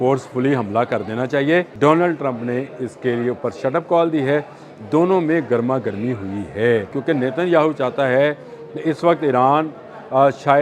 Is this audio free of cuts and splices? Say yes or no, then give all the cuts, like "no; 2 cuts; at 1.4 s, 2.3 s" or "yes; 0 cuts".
no; 2 cuts; at 1.7 s, 7.0 s